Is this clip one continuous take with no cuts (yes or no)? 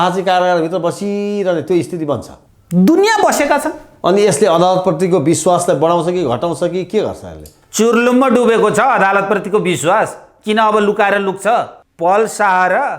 no